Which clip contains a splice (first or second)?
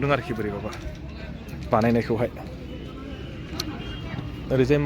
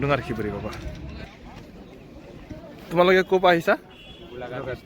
second